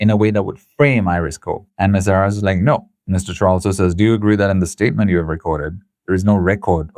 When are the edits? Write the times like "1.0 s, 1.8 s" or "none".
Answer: 2.9 s